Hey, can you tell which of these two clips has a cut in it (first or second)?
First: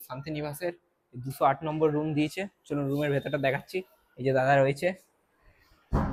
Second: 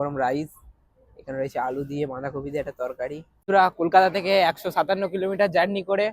second